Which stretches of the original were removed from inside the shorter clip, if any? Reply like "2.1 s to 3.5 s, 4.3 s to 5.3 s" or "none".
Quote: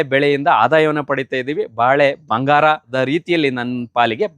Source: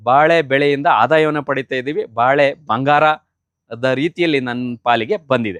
3.2 s to 3.8 s

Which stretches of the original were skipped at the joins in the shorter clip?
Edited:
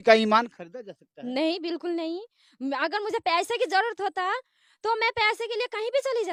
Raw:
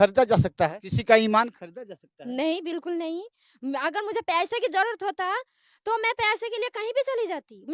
none

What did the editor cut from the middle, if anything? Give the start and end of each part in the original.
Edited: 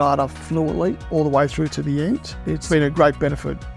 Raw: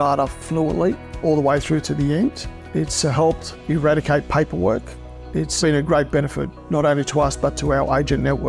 1.0 s to 1.1 s, 2.7 s to 5.5 s

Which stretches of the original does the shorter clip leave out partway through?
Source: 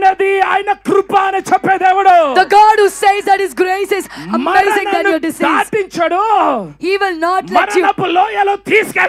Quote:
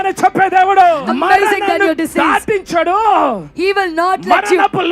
2.3 s to 4.2 s

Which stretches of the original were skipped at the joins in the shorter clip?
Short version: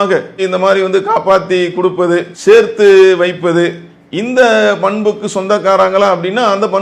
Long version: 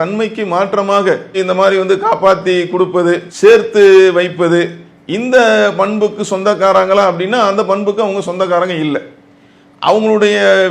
none

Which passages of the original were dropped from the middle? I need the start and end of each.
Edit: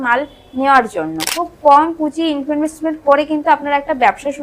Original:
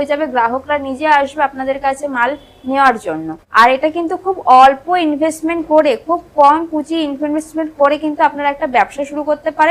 3.4 s to 6.1 s

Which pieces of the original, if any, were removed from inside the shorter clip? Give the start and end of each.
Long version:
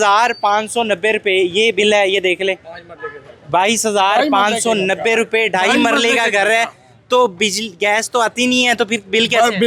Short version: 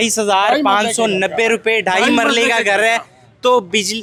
none

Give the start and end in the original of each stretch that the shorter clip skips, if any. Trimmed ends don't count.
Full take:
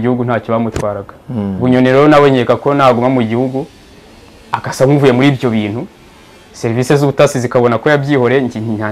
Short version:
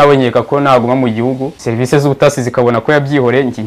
3.7 s to 6.5 s

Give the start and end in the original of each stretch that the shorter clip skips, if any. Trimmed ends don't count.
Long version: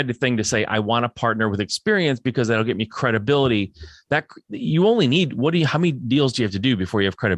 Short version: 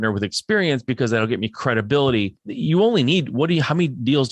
3.8 s to 4.5 s

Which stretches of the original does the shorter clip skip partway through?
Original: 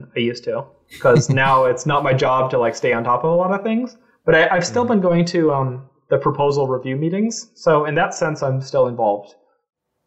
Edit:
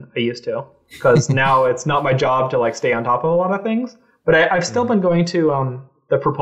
none

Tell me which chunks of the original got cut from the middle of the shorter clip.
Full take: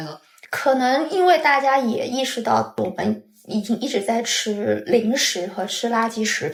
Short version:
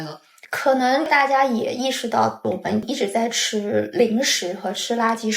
1.1 s to 1.4 s, 3.2 s to 3.8 s

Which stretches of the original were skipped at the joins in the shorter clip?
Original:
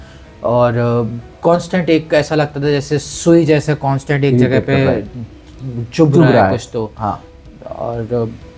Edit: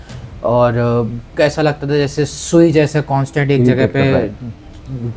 1.3 s to 2.1 s

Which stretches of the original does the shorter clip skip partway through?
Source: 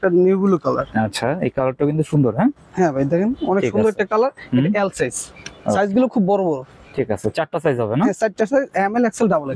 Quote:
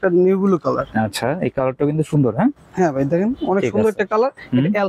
none

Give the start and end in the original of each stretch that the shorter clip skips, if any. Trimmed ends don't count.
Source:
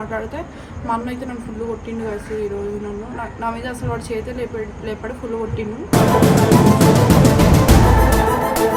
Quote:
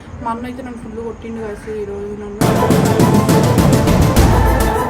3.0 s to 5.9 s

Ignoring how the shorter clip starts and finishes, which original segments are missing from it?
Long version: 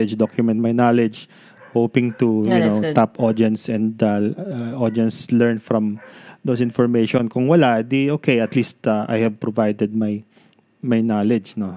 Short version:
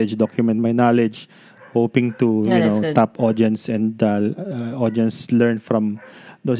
none

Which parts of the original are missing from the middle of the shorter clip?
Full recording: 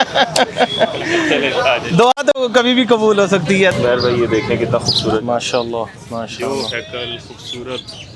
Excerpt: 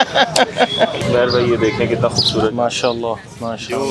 1.0 s to 3.7 s

